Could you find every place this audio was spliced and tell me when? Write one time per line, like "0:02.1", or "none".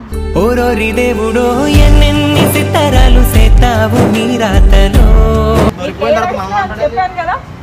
0:05.8